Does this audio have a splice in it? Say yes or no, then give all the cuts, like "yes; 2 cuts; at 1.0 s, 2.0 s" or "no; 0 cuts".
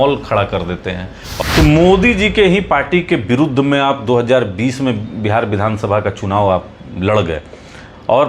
yes; 1 cut; at 1.3 s